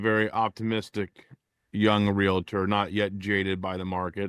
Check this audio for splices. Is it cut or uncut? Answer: uncut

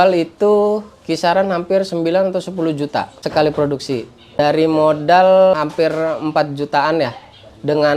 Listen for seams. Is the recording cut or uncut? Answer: cut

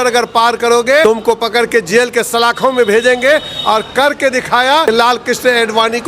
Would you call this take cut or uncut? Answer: cut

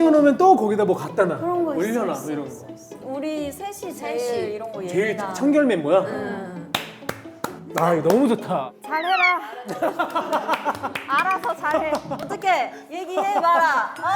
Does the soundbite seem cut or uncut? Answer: uncut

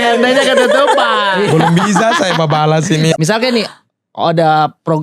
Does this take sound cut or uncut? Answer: cut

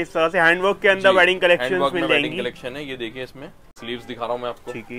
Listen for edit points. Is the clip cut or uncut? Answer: cut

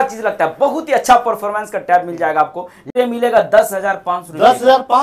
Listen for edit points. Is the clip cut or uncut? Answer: cut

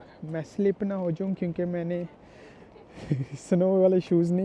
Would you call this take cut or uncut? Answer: cut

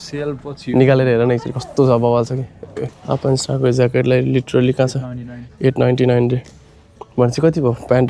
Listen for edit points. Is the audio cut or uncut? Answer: cut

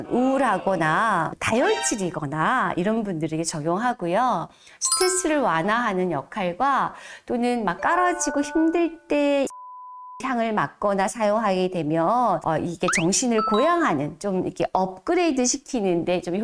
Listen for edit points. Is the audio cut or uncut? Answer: uncut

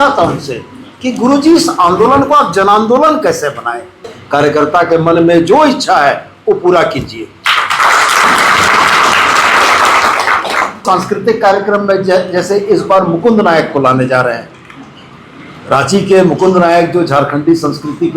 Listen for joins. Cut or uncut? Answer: cut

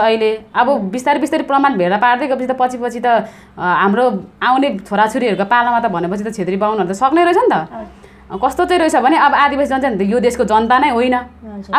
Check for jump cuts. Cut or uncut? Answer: cut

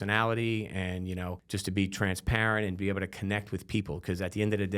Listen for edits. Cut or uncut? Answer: cut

